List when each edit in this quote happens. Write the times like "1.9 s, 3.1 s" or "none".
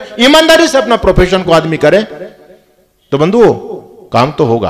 none